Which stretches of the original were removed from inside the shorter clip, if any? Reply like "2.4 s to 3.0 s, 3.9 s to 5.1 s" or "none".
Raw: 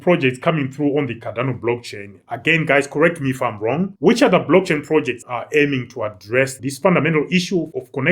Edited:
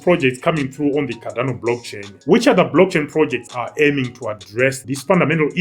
2.2 s to 3.9 s